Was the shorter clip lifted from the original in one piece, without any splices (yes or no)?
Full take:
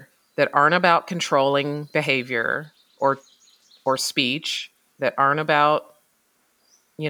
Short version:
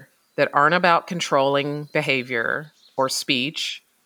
no